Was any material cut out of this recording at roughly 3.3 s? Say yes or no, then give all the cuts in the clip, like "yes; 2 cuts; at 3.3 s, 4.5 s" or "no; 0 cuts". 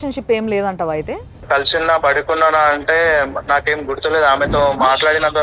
no; 1 cut; at 1.4 s